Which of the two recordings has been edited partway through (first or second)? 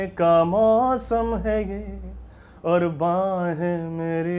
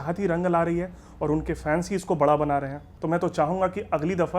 second